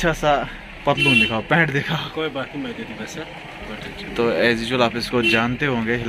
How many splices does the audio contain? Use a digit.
0